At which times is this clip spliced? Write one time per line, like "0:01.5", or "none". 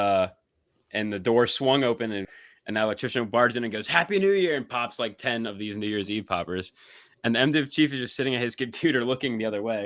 0:02.3